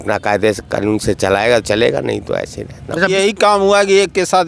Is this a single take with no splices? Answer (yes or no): no